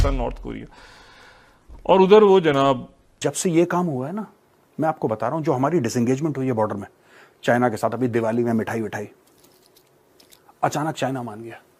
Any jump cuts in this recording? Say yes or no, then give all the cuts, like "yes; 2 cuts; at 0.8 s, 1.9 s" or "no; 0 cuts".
yes; 1 cut; at 3.3 s